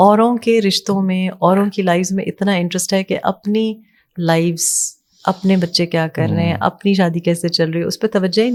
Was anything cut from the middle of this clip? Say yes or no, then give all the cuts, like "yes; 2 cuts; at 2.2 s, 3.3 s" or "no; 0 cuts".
no; 0 cuts